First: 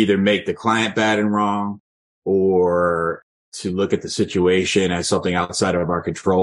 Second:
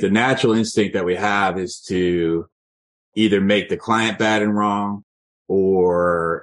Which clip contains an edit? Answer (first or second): first